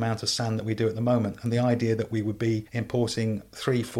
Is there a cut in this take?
yes; 1 cut; at 2.7 s

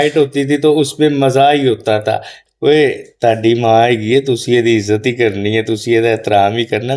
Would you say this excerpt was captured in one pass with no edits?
no; 1 cut; at 2.4 s

